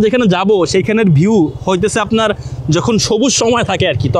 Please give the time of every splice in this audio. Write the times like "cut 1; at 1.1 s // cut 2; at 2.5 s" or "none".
none